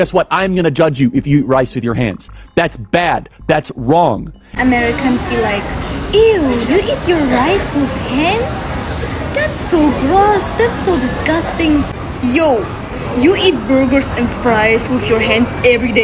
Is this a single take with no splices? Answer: no; 1 cut; at 4.4 s

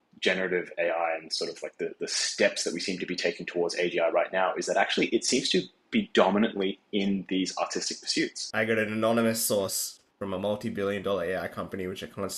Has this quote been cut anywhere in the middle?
yes; 1 cut; at 8.4 s

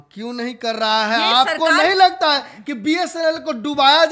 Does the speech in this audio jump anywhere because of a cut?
no; 0 cuts

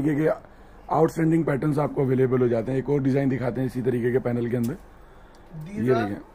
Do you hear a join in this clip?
no; 0 cuts

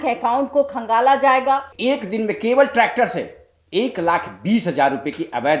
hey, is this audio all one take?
no; 1 cut; at 1.7 s

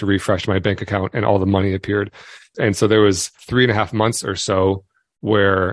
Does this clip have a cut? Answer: yes; 2 cuts; at 2.4 s, 3.4 s

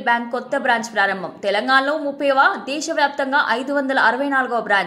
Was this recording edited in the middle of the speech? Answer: no; 0 cuts

